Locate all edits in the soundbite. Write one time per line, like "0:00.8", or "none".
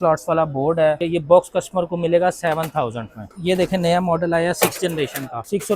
0:01.0
0:03.2